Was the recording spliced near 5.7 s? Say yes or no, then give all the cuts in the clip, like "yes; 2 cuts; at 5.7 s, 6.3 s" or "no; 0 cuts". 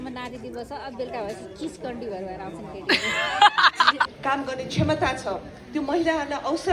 no; 1 cut; at 4.1 s